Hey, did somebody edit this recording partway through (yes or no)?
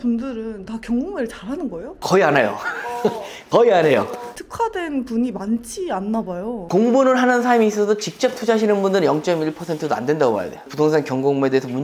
no